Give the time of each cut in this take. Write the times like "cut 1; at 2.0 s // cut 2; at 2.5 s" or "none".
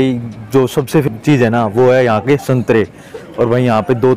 cut 1; at 1.1 s